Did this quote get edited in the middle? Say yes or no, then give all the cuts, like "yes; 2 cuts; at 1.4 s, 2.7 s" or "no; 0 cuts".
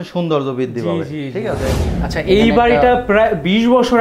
yes; 1 cut; at 1.9 s